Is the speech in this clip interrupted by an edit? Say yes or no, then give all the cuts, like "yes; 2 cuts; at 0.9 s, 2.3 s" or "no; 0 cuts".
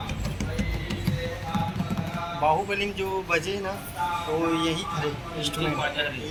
no; 0 cuts